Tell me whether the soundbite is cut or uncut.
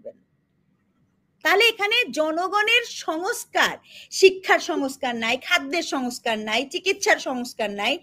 uncut